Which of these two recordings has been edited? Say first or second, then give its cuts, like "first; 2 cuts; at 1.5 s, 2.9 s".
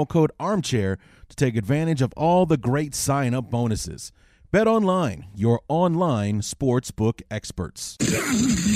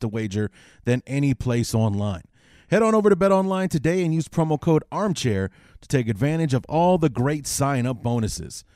first; 1 cut; at 7.8 s